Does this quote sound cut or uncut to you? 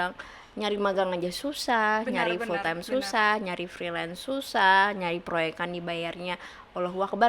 uncut